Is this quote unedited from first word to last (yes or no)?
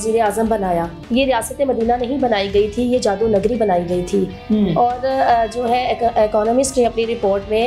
no